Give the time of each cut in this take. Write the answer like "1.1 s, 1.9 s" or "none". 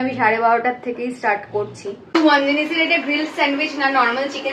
2.1 s